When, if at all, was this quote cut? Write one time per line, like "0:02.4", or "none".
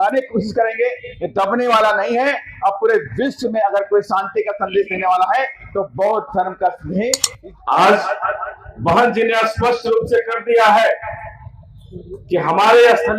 0:07.3